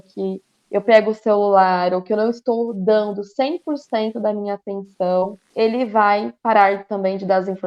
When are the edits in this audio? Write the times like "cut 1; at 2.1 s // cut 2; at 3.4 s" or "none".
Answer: cut 1; at 5.4 s

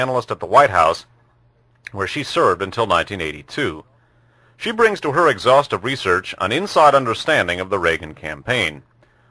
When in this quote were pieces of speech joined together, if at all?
none

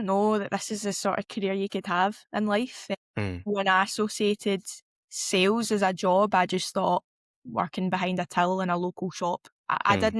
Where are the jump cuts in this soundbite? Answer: none

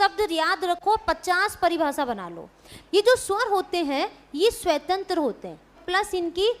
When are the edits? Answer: cut 1; at 2.7 s // cut 2; at 5.8 s

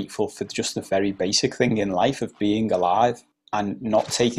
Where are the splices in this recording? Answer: cut 1; at 3.3 s

